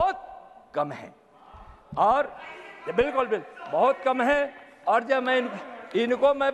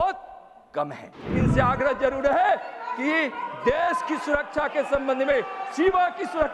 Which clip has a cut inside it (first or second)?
second